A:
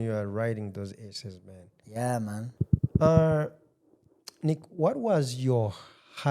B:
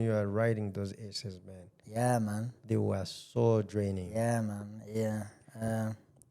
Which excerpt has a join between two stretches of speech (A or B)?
A